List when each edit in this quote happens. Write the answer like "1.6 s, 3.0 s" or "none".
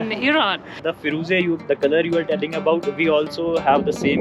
0.9 s